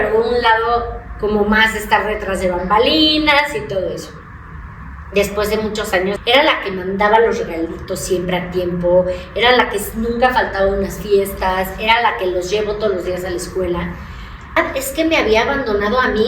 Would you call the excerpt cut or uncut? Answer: cut